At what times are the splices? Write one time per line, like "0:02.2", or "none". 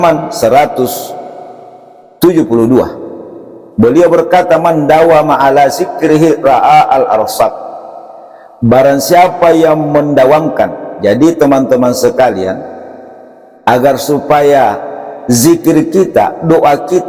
none

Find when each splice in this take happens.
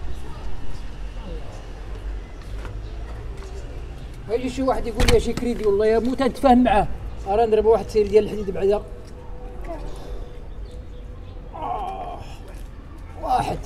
none

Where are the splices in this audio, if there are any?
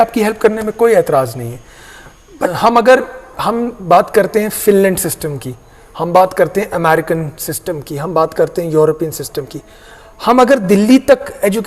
0:02.5

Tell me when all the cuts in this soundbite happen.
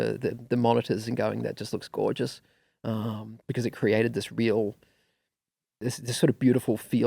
none

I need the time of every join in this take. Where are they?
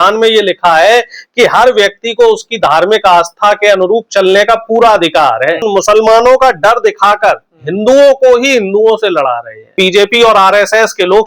0:05.7
0:09.8

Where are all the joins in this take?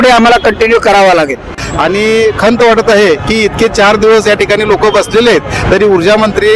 0:01.6

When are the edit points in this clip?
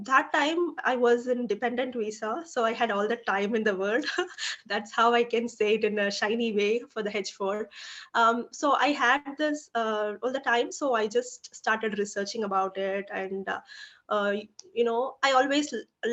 none

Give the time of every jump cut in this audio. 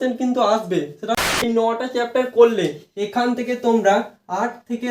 0:01.3

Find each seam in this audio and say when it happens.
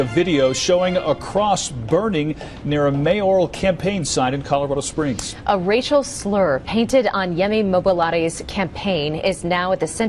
none

